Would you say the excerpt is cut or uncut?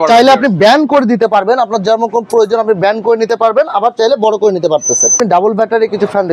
cut